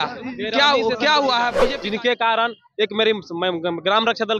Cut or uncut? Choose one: cut